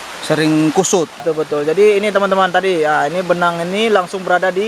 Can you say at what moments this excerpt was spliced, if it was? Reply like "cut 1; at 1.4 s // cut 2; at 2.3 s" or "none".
cut 1; at 1.2 s